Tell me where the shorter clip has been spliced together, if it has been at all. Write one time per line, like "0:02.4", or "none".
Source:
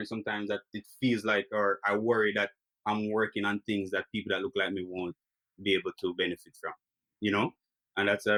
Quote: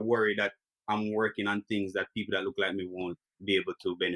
0:03.3